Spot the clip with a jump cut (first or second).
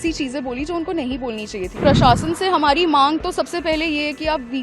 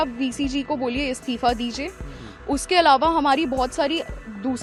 first